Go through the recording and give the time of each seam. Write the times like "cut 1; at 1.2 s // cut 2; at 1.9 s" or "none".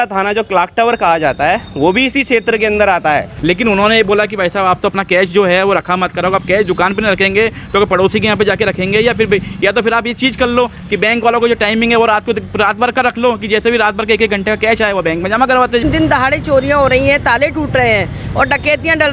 cut 1; at 3.3 s // cut 2; at 15.8 s